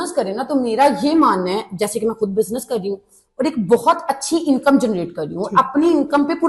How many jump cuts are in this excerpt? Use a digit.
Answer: 0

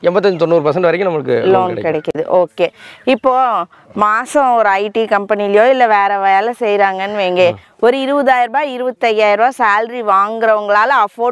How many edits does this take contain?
0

